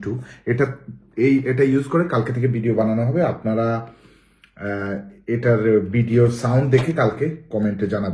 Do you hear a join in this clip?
no; 0 cuts

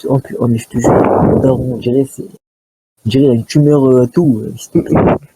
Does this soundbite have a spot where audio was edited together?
yes; 1 cut; at 4.3 s

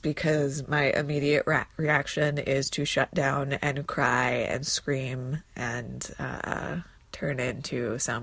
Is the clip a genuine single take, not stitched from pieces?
no; 1 cut; at 7.0 s

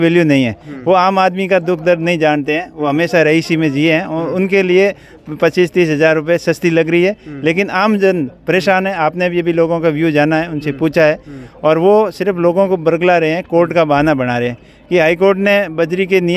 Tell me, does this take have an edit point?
no; 0 cuts

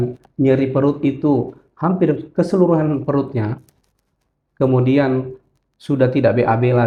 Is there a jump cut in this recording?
no; 0 cuts

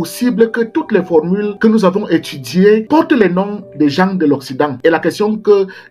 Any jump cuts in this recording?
yes; 3 cuts; at 1.5 s, 2.8 s, 4.7 s

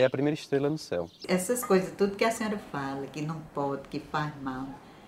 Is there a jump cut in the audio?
yes; 1 cut; at 1.2 s

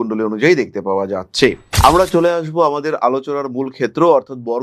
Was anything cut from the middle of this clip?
yes; 1 cut; at 1.7 s

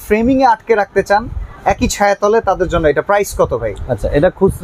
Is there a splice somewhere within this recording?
no; 0 cuts

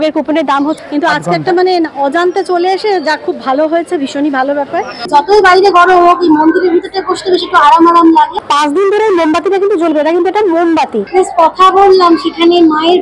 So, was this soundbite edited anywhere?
yes; 4 cuts; at 0.8 s, 5.1 s, 8.4 s, 11.0 s

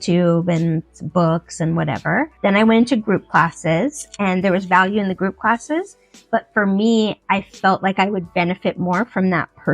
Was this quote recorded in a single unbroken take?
yes; 0 cuts

